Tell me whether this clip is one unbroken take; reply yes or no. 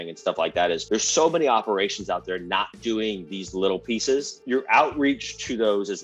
no